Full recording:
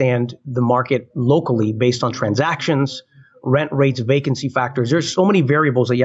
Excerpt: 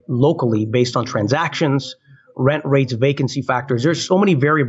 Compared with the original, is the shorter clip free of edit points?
yes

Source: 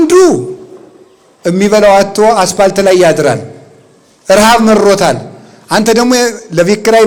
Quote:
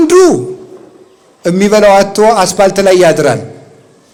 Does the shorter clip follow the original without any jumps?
yes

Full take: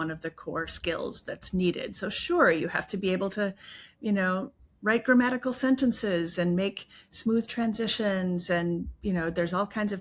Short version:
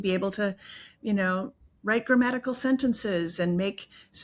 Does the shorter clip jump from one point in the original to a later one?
no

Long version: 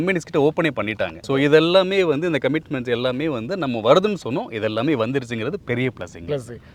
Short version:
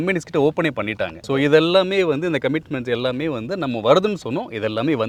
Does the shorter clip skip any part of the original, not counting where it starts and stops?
no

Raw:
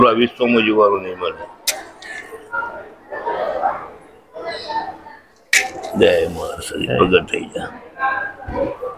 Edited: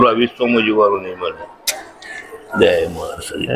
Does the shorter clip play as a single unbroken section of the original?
no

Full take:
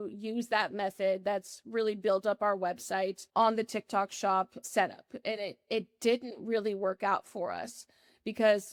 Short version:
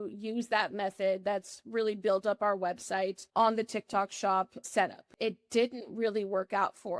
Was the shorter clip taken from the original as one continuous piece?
no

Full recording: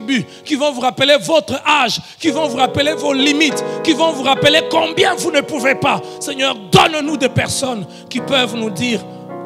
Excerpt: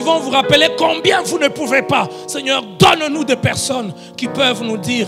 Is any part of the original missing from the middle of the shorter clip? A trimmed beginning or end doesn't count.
no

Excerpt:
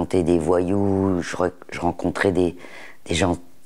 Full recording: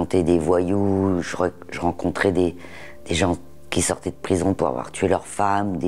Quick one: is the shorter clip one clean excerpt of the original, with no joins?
yes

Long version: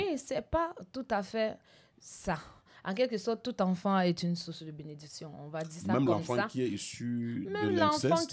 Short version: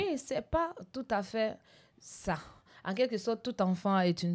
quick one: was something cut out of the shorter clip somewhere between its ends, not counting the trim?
no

